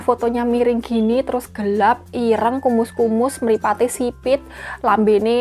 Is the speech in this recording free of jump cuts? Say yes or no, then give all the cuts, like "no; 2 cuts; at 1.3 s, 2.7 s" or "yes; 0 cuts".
yes; 0 cuts